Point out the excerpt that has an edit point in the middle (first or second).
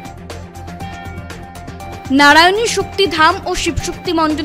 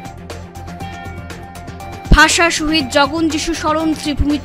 first